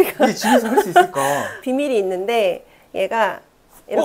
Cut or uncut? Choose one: cut